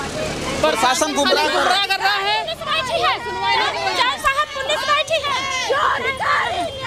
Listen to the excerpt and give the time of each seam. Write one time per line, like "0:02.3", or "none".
none